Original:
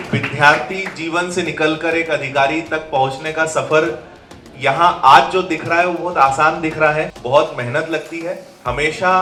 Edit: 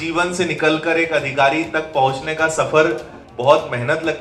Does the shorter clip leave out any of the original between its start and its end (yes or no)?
yes